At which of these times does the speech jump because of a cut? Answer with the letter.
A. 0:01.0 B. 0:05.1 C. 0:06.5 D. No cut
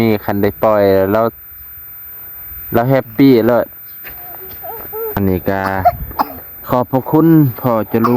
B